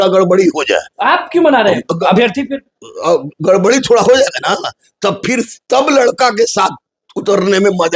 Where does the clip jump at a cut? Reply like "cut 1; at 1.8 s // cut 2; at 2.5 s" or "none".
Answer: cut 1; at 0.9 s